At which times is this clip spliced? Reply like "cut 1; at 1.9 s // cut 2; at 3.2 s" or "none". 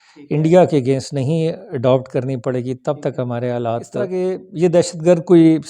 cut 1; at 4.1 s